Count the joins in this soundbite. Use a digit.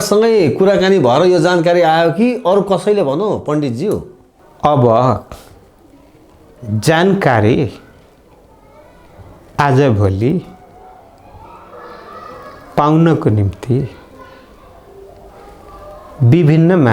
0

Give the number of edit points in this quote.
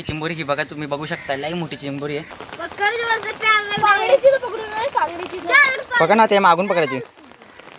1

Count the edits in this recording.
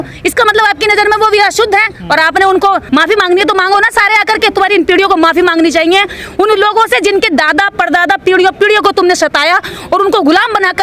1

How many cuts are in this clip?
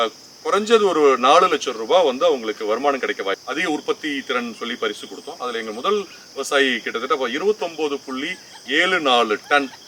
1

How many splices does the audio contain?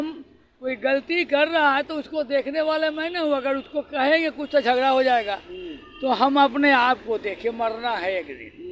0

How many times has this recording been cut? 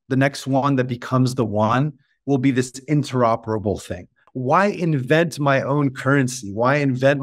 1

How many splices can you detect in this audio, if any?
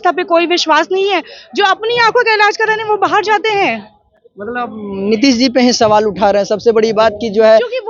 0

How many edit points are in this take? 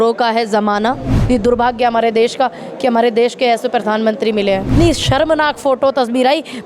2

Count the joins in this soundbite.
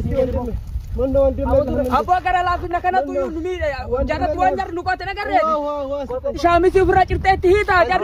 1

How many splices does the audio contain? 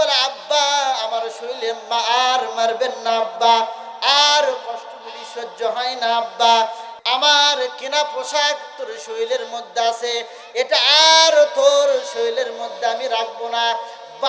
1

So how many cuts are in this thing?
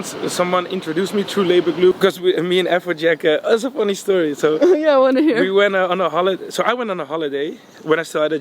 1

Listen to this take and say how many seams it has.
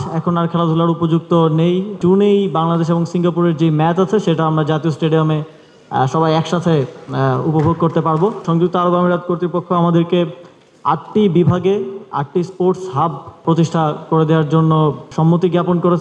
4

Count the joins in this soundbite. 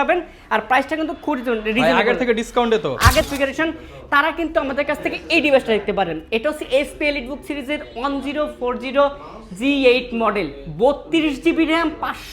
1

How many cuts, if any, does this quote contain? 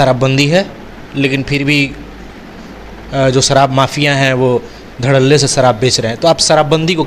0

